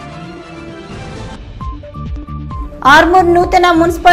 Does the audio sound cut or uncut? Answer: cut